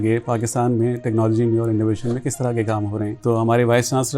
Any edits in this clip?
yes; 1 cut; at 3.1 s

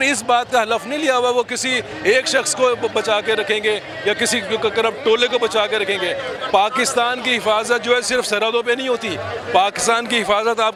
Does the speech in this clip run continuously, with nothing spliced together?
yes; 0 cuts

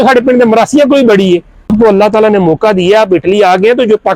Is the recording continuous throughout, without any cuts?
no; 1 cut; at 1.7 s

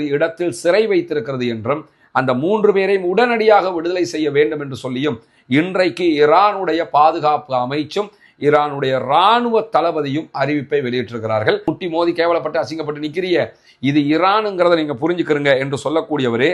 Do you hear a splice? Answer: yes; 1 cut; at 11.6 s

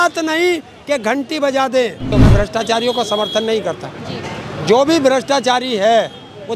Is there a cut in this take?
yes; 1 cut; at 2.2 s

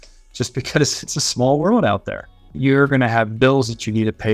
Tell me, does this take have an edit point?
yes; 1 cut; at 2.5 s

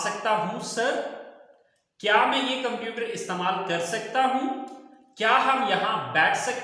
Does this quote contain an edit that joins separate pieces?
no; 0 cuts

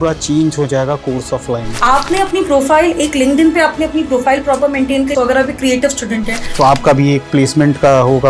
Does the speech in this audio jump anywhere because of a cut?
yes; 3 cuts; at 1.7 s, 5.1 s, 6.4 s

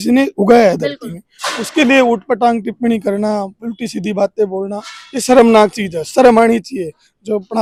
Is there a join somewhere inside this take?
no; 0 cuts

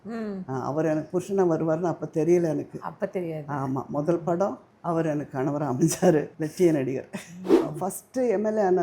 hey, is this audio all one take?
no; 3 cuts; at 4.7 s, 6.3 s, 7.5 s

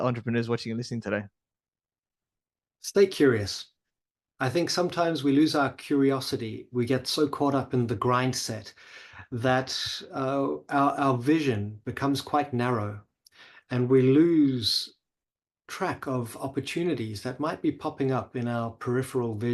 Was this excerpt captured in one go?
yes; 0 cuts

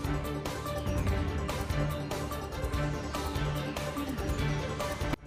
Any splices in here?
no; 0 cuts

